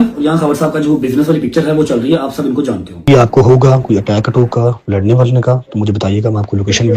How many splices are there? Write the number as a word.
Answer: one